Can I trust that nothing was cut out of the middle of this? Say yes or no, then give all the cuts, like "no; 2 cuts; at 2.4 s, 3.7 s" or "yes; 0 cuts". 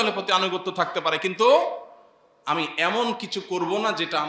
yes; 0 cuts